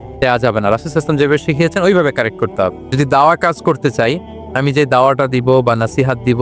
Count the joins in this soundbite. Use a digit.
1